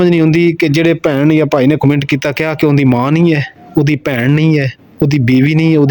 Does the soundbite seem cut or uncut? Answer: uncut